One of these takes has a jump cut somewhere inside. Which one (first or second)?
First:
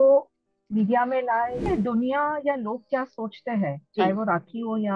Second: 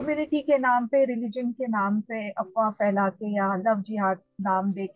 first